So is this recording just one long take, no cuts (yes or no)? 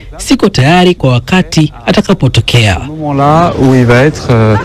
no